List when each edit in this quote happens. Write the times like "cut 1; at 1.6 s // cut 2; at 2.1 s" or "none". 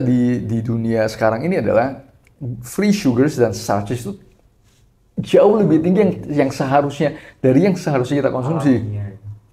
none